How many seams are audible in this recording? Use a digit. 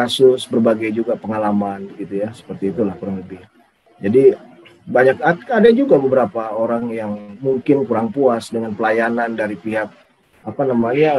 0